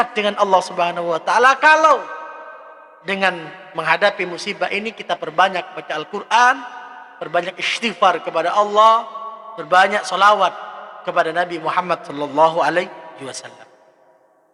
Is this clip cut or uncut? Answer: uncut